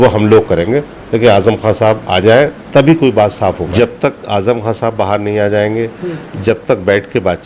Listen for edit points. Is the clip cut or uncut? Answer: cut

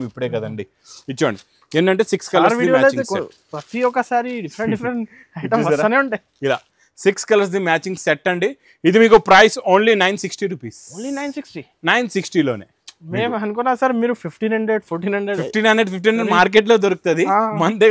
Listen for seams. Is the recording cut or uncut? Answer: uncut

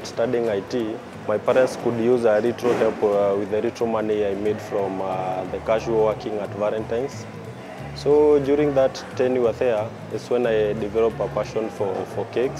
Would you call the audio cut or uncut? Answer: cut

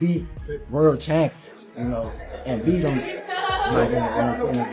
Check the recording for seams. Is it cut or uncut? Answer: uncut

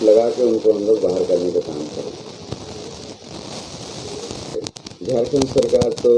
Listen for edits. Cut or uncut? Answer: cut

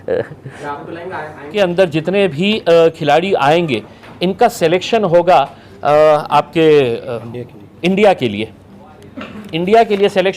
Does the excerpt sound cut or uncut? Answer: cut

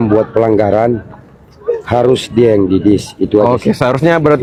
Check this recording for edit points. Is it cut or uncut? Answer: uncut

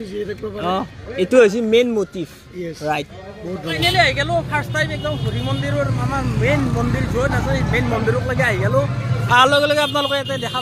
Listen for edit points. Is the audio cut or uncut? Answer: uncut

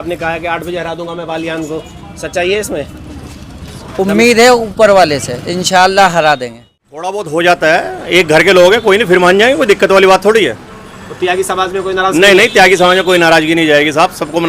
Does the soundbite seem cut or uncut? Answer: cut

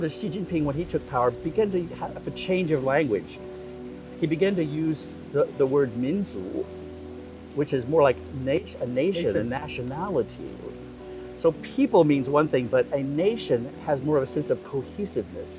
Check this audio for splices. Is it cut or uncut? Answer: uncut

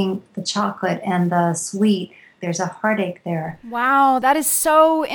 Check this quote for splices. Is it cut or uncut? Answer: cut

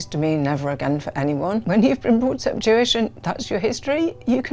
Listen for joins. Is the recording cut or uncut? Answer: cut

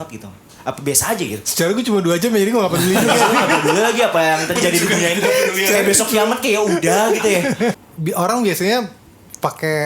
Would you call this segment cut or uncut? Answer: cut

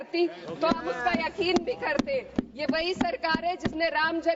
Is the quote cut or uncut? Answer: cut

